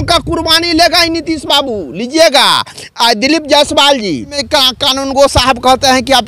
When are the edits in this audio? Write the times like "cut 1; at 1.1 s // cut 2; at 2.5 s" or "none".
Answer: cut 1; at 4.4 s

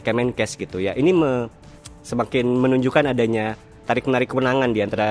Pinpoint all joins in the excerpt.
none

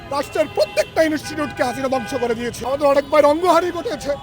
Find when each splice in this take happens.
cut 1; at 2.5 s

